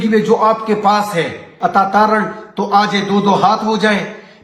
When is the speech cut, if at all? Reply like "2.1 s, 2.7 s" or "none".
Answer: 1.5 s